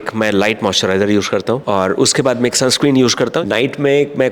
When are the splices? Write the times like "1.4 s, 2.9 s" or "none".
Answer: 1.6 s, 3.4 s